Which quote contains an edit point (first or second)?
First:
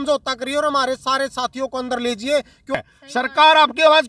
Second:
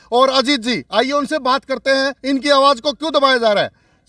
first